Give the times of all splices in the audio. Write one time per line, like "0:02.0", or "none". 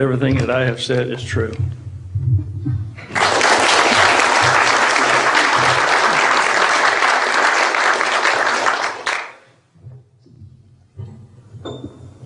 none